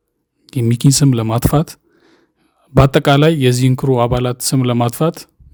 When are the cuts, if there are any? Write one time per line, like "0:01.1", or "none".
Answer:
none